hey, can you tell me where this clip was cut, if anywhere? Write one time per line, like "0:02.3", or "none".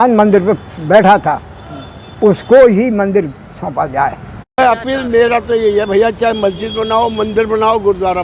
0:04.6